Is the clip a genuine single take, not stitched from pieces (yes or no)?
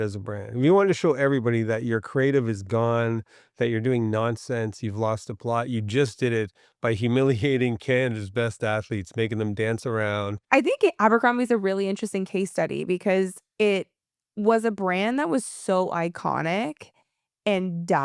no